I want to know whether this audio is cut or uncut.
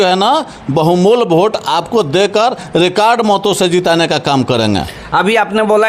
uncut